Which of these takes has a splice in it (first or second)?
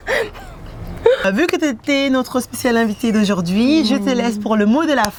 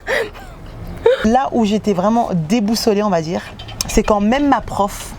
second